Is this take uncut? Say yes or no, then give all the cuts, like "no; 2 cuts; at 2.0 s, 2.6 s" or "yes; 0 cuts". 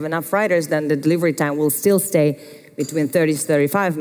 yes; 0 cuts